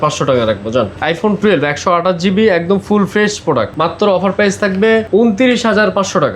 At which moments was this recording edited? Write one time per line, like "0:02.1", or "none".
none